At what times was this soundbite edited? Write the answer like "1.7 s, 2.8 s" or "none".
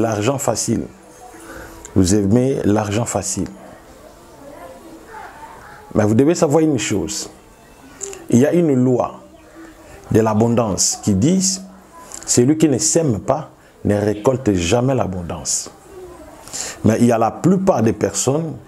none